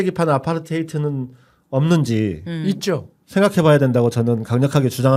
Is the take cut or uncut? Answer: uncut